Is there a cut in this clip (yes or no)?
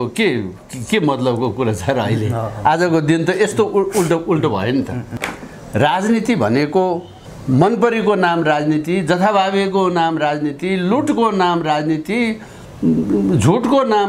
yes